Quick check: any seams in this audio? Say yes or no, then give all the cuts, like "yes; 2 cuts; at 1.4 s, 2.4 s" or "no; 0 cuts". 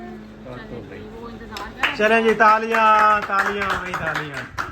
no; 0 cuts